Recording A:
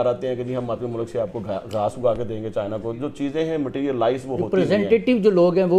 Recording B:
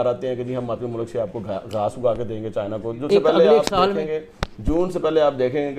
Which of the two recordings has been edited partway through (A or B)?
B